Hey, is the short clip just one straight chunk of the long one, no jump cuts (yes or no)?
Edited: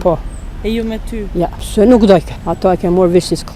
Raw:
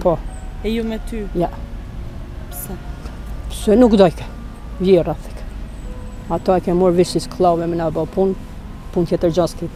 no